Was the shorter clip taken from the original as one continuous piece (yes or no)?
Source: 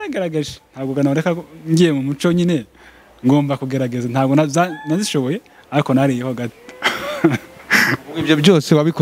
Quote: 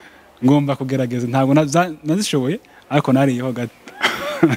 yes